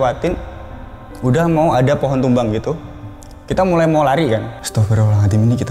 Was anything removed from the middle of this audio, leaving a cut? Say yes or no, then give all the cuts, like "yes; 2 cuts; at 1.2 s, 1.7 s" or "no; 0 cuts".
yes; 1 cut; at 4.5 s